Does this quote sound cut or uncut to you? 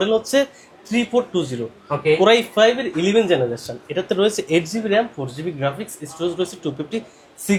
uncut